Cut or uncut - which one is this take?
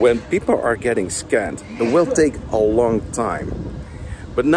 uncut